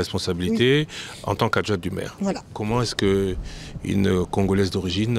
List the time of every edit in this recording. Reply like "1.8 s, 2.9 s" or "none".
2.5 s